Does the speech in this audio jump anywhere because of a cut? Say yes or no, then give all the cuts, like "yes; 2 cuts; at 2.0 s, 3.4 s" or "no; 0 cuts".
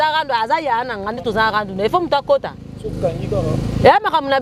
no; 0 cuts